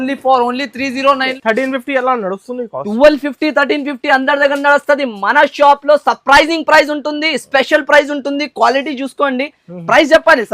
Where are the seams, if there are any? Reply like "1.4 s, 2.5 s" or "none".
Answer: 1.3 s